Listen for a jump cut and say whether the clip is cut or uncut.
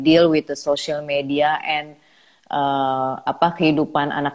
uncut